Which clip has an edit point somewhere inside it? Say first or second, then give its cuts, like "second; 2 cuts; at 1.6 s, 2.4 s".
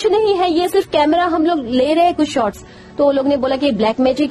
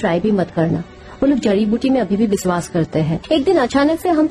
second; 1 cut; at 3.2 s